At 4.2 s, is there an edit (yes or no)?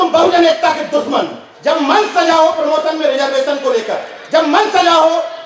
no